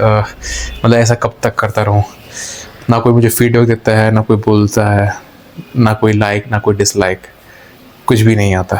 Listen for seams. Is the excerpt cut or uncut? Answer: uncut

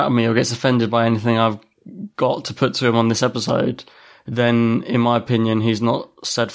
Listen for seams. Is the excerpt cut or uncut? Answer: uncut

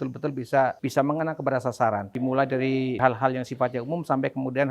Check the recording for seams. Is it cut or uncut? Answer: cut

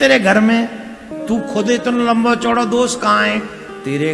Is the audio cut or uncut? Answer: cut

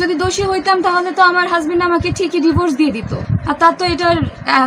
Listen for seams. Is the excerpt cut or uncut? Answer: cut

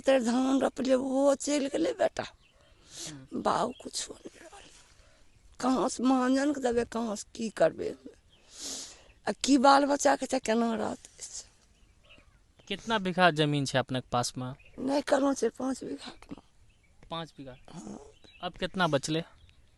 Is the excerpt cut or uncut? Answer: uncut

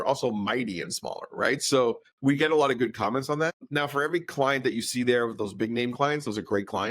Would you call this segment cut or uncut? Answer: cut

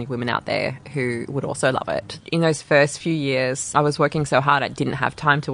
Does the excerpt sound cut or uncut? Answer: cut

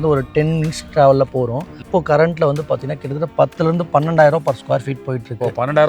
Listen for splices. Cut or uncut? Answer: cut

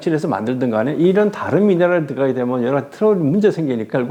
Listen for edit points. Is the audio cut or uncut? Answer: uncut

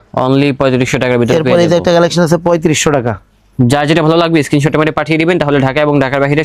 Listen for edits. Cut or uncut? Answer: uncut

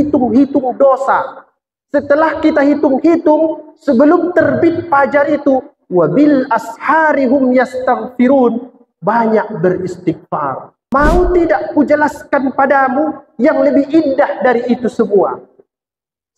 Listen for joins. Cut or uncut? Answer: cut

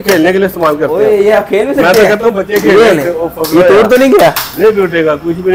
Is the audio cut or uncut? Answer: uncut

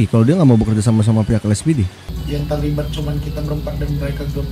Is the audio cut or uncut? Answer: cut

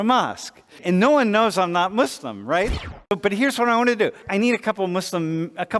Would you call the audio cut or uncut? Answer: cut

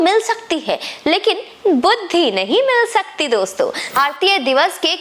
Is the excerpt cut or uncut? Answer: cut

